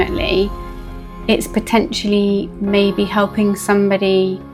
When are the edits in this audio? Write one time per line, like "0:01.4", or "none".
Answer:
none